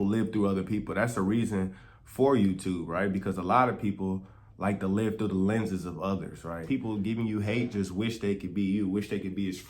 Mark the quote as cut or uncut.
cut